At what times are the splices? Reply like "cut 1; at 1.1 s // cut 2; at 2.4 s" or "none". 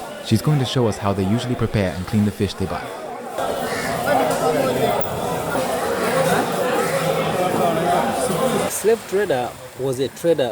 cut 1; at 5.6 s // cut 2; at 8.7 s